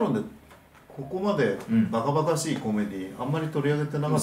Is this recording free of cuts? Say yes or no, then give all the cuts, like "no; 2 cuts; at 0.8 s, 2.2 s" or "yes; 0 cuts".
yes; 0 cuts